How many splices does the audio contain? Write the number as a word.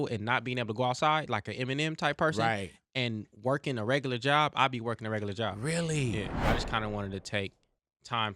one